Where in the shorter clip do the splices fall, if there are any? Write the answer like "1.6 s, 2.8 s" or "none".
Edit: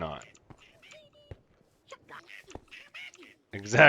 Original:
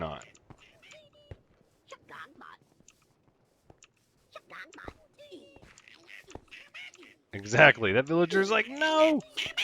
2.2 s